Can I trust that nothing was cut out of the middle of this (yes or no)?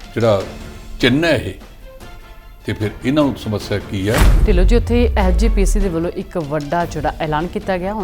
no